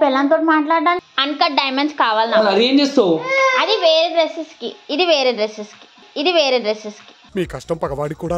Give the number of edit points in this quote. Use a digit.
1